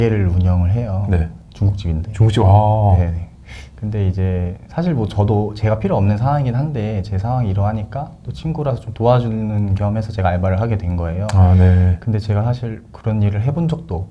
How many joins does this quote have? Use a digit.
0